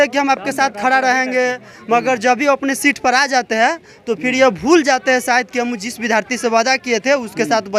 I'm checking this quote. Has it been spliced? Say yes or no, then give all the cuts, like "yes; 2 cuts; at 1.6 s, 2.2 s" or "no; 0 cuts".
no; 0 cuts